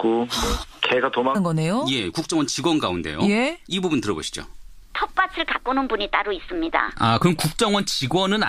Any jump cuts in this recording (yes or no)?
no